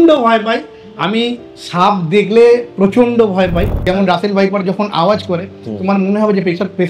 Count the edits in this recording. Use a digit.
1